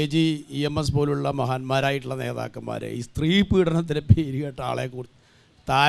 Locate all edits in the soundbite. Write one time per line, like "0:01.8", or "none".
none